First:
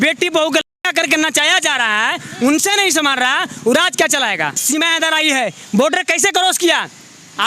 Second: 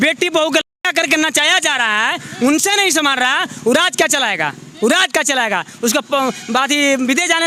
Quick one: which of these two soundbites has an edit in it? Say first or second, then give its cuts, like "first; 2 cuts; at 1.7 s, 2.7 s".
first; 1 cut; at 4.6 s